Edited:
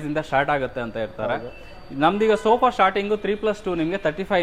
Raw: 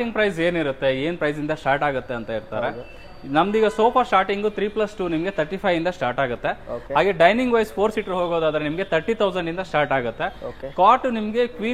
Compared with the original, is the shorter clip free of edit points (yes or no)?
yes